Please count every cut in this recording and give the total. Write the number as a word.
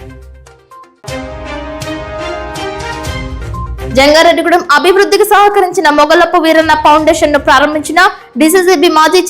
one